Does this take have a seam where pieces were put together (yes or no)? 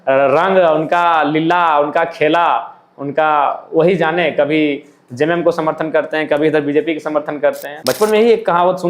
yes